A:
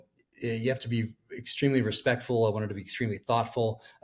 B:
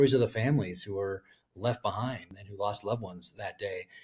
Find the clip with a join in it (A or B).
B